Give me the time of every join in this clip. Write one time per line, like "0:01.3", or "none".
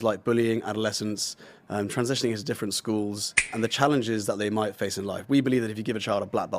0:03.5